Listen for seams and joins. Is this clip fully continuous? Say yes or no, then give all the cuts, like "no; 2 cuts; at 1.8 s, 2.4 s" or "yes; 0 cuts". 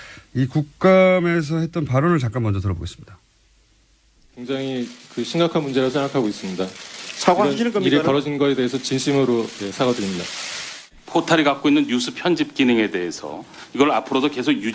no; 1 cut; at 10.4 s